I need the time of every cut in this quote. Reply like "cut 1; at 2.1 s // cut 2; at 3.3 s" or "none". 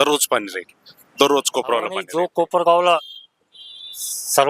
cut 1; at 2.0 s